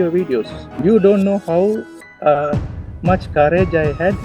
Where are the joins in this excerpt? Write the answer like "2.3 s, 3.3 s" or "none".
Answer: none